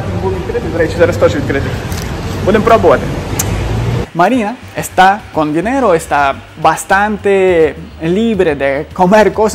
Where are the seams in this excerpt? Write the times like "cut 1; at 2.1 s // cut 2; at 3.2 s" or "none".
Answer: cut 1; at 4.0 s